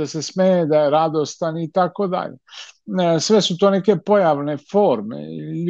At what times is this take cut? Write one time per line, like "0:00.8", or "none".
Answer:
none